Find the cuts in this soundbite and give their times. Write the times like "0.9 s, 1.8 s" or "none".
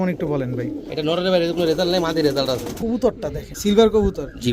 2.7 s, 3.5 s

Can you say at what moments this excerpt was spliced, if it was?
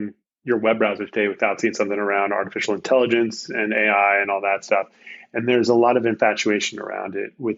none

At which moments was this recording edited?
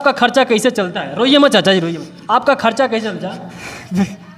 none

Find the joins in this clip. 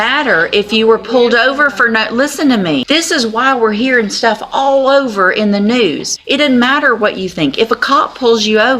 2.8 s, 6.1 s

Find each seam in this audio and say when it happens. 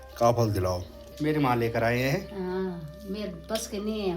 1.1 s

